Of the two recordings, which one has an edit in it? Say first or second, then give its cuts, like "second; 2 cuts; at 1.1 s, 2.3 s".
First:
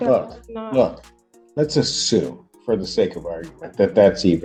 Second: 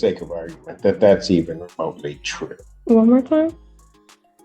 second; 1 cut; at 2.7 s